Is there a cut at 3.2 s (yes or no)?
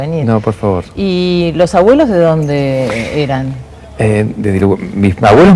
yes